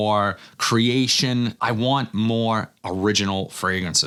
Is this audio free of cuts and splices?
yes; 0 cuts

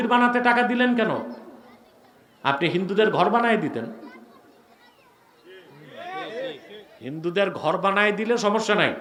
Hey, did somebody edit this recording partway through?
no; 0 cuts

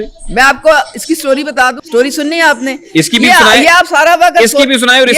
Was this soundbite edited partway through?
yes; 1 cut; at 1.8 s

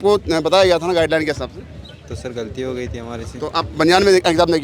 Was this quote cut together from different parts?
no; 0 cuts

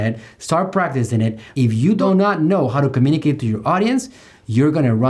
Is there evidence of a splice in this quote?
yes; 1 cut; at 1.9 s

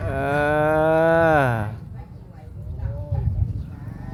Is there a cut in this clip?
no; 0 cuts

